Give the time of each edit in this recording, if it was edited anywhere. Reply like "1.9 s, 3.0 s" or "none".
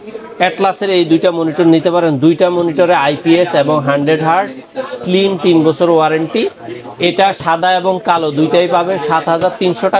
none